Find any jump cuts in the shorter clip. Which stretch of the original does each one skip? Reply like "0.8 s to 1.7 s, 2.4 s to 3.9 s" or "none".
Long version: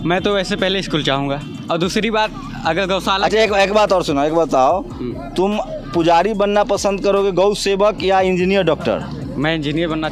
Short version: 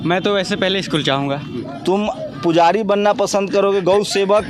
1.5 s to 5.0 s